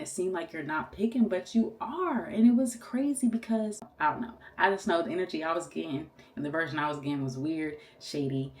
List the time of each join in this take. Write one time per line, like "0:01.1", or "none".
0:03.9